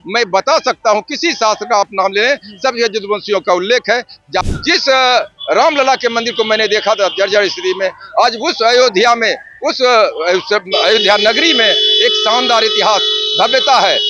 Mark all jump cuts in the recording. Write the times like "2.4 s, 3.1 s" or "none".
4.4 s